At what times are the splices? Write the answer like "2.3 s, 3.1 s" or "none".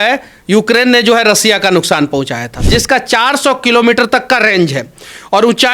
2.5 s